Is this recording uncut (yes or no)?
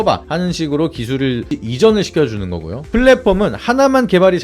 no